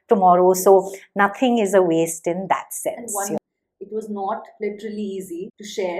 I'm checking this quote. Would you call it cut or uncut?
cut